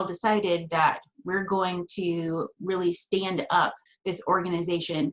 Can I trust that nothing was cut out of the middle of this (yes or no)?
no